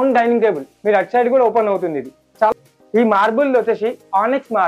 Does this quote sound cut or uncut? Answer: cut